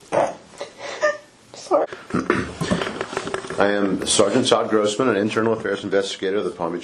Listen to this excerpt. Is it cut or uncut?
cut